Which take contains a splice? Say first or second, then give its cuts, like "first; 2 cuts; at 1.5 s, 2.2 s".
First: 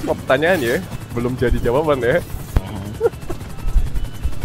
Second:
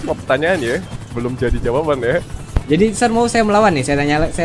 second; 1 cut; at 2.5 s